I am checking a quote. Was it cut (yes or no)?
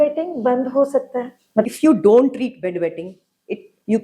yes